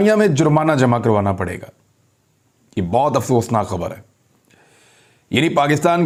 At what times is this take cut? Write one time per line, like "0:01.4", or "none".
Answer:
none